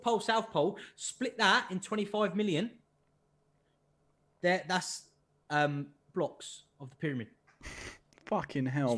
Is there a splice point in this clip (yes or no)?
no